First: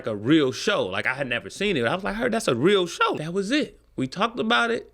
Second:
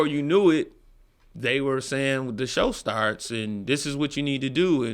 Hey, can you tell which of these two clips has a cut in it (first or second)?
first